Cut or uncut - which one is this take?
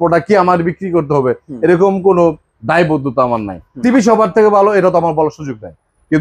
cut